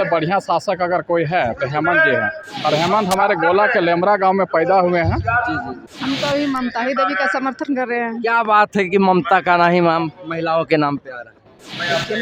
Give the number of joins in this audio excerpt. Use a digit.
1